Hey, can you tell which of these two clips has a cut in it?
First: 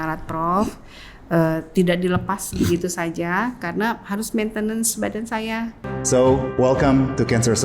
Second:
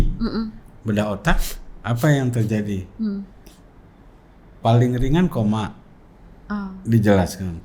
first; 1 cut; at 5.8 s

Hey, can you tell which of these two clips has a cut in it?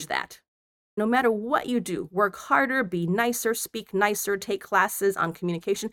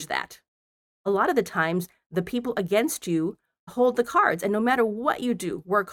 first; 1 cut; at 1.0 s

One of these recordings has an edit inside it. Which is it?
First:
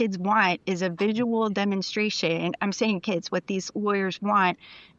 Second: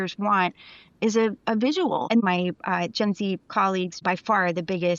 second; 2 cuts; at 2.2 s, 4.0 s

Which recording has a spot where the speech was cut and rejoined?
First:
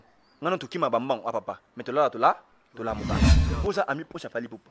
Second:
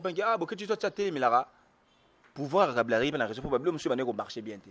first; 1 cut; at 3.4 s

